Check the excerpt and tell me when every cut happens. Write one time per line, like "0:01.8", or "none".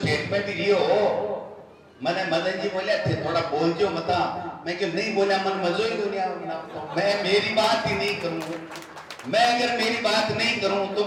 none